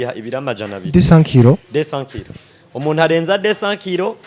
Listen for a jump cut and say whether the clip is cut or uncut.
uncut